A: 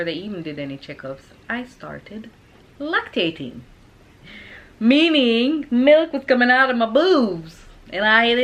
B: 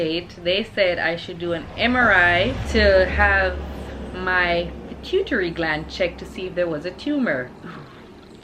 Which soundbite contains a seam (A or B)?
B